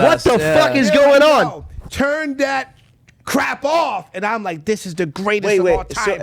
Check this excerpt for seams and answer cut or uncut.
uncut